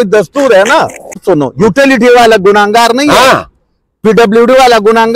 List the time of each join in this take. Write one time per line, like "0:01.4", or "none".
0:01.2